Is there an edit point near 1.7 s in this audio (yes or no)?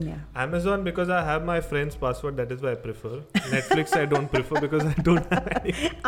no